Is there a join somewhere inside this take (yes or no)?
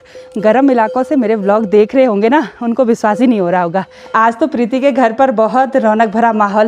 yes